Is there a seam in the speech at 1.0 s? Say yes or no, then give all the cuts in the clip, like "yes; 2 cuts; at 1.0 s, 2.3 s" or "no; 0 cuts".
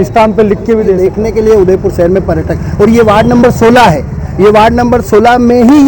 yes; 1 cut; at 1.0 s